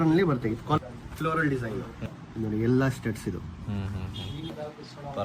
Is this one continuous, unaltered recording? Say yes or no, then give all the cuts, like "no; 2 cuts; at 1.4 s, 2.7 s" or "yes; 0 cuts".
no; 3 cuts; at 0.8 s, 2.0 s, 4.5 s